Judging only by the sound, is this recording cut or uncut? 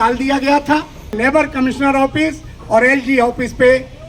cut